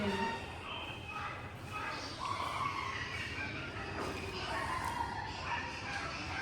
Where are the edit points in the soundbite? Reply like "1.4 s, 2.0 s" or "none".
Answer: none